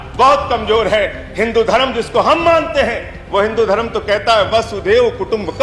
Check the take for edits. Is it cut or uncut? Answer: uncut